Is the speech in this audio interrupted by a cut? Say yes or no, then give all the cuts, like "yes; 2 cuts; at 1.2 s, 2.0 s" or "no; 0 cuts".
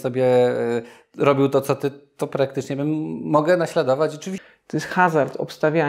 yes; 1 cut; at 4.3 s